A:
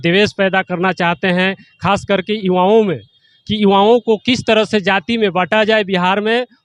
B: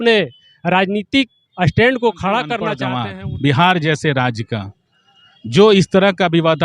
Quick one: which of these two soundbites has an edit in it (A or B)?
B